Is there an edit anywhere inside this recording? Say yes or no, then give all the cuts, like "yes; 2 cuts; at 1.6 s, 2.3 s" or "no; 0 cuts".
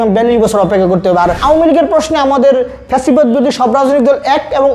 yes; 1 cut; at 1.4 s